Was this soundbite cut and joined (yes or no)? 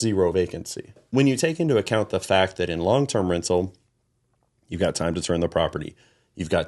yes